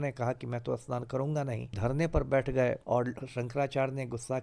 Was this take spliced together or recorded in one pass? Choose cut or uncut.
cut